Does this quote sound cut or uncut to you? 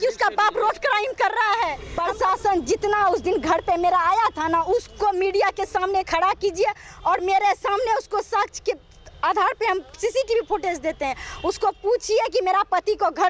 cut